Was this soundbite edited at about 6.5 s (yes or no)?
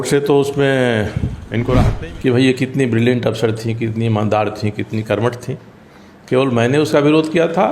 no